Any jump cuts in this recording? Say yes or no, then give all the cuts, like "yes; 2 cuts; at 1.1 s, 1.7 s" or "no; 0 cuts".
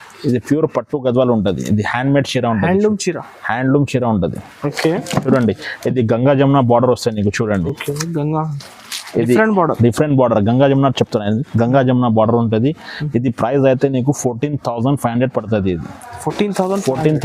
no; 0 cuts